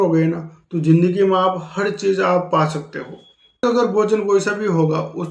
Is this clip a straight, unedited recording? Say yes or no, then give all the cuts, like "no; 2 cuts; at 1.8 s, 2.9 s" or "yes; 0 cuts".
no; 1 cut; at 3.6 s